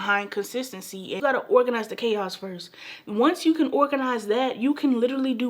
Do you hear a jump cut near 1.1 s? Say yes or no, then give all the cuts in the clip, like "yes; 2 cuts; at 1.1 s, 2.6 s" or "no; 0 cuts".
yes; 1 cut; at 1.1 s